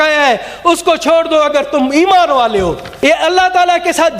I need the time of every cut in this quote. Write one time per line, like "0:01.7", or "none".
0:02.9

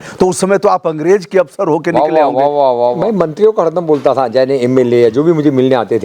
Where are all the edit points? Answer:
0:03.0

